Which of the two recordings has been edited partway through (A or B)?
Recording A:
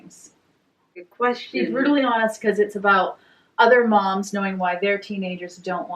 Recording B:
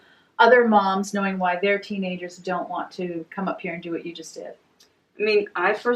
A